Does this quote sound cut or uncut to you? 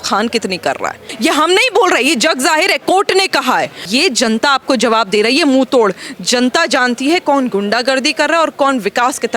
cut